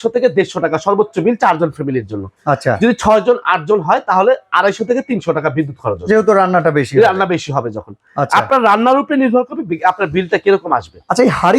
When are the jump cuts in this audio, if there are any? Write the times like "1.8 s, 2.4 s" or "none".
none